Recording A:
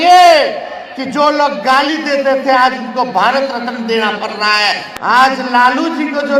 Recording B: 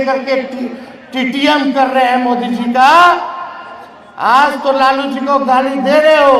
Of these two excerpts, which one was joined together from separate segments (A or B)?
A